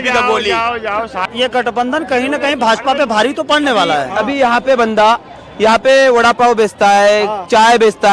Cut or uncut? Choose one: cut